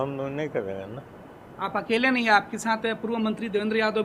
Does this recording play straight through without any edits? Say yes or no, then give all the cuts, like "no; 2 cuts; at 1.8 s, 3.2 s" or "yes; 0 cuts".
yes; 0 cuts